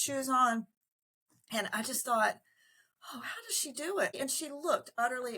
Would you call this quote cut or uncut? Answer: cut